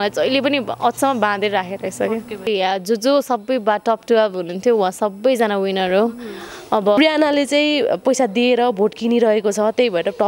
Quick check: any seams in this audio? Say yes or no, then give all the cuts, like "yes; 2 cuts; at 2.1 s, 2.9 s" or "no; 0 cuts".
yes; 2 cuts; at 2.5 s, 7.0 s